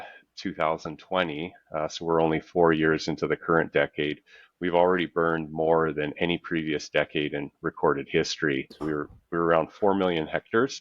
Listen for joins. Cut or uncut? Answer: cut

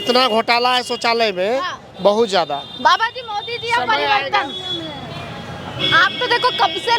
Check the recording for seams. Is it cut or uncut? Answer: uncut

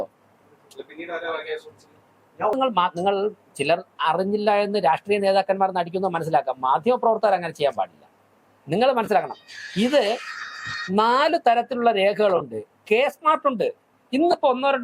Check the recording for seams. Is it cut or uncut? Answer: cut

